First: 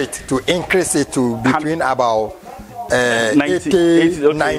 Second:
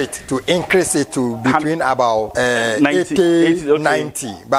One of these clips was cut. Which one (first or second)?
second